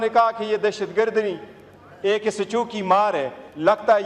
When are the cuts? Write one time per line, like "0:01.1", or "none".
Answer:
none